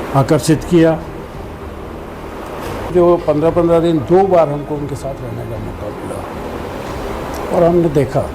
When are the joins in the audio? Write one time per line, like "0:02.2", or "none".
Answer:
0:02.9